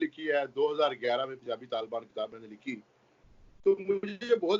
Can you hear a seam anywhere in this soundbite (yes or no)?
no